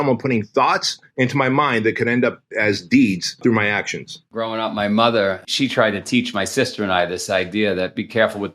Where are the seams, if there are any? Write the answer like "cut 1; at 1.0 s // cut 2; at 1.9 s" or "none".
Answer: cut 1; at 1.0 s // cut 2; at 3.8 s // cut 3; at 5.4 s